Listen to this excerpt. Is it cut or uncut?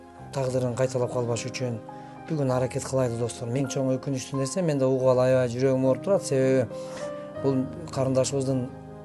cut